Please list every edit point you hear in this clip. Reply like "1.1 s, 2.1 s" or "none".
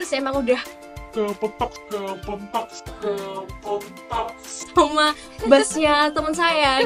none